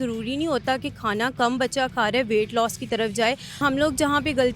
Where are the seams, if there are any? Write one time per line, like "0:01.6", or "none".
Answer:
0:03.6